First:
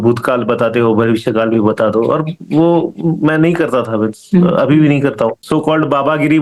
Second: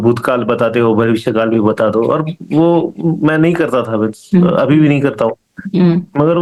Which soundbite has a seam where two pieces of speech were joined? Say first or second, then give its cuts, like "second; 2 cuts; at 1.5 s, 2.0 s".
first; 1 cut; at 5.4 s